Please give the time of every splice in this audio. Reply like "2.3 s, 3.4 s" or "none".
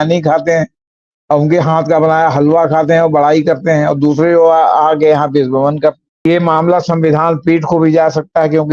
6.2 s